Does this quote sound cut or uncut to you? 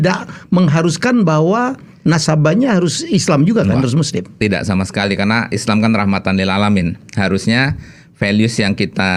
uncut